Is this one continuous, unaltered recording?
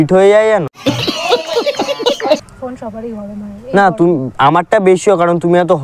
no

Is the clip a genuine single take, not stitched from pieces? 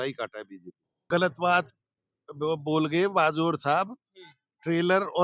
no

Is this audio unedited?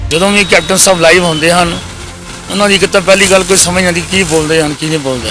yes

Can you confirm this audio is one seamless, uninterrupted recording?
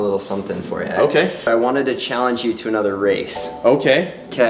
no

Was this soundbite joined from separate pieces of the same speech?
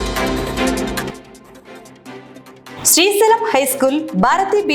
yes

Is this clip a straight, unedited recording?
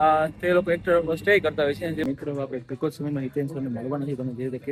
no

